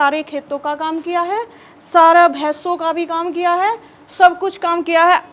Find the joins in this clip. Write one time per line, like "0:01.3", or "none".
none